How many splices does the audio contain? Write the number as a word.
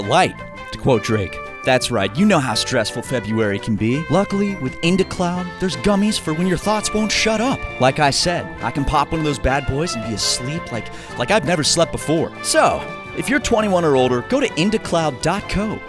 two